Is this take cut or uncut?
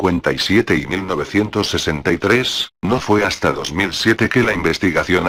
uncut